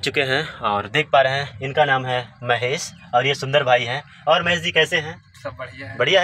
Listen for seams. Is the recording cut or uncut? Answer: uncut